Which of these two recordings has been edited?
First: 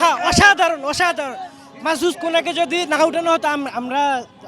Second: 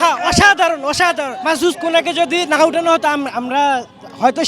second; 1 cut; at 1.3 s

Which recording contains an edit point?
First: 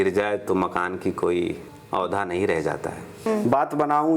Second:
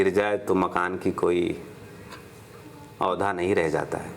first; 2 cuts; at 1.7 s, 3.1 s

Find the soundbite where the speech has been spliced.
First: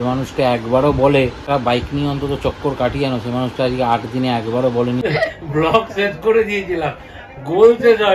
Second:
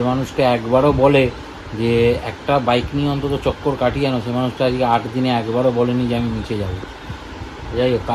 first; 2 cuts; at 1.4 s, 5.0 s

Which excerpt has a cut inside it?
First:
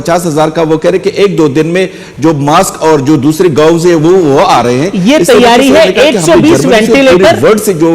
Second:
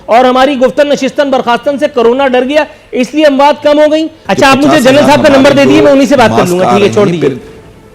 second; 1 cut; at 4.2 s

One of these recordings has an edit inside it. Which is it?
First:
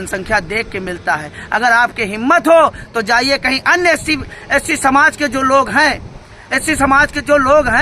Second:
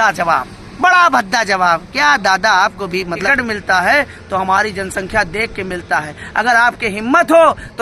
second; 1 cut; at 3.1 s

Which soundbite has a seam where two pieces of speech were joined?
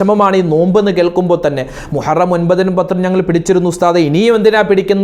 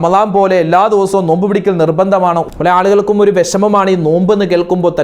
second; 1 cut; at 2.4 s

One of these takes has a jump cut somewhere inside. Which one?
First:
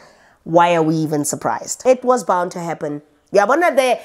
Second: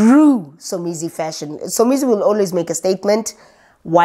first; 1 cut; at 1.6 s

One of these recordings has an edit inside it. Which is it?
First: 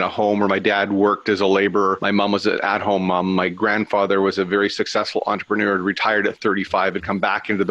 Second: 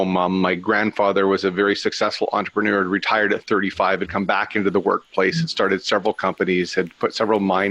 first; 1 cut; at 2.0 s

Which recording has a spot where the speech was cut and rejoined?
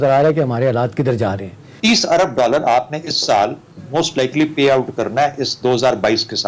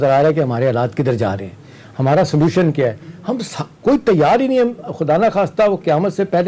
first; 1 cut; at 1.7 s

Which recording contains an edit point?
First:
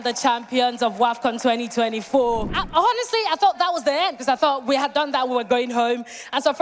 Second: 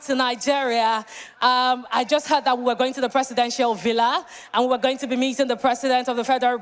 first; 1 cut; at 2.6 s

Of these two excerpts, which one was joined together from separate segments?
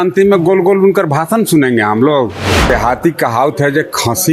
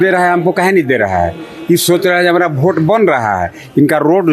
first; 1 cut; at 2.7 s

